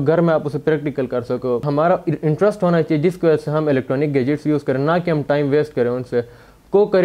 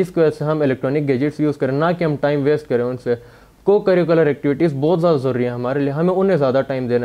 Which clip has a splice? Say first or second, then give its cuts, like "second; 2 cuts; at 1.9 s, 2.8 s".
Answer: first; 1 cut; at 1.6 s